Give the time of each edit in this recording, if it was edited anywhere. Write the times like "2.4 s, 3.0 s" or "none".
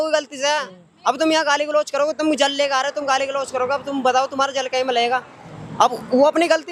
none